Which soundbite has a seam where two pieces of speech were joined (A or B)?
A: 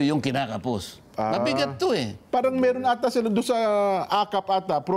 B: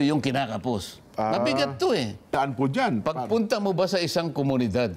B